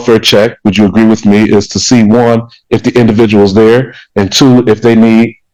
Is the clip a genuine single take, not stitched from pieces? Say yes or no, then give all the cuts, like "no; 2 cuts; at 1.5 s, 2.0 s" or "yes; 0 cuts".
yes; 0 cuts